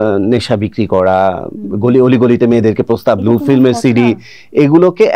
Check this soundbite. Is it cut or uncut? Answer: uncut